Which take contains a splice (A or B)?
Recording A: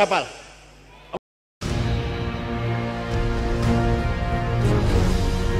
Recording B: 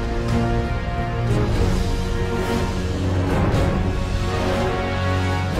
A